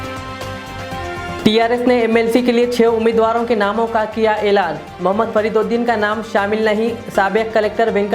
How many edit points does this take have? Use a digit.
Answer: 1